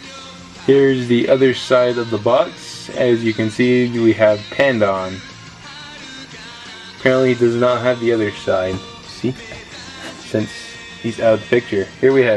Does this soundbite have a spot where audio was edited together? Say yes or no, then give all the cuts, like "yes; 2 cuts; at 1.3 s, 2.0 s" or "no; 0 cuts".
yes; 1 cut; at 7.3 s